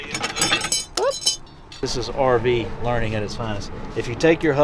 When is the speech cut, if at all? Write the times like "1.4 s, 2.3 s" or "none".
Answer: 1.8 s